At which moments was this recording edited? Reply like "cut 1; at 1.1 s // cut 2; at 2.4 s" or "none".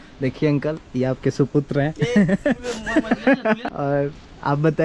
cut 1; at 2.2 s // cut 2; at 3.6 s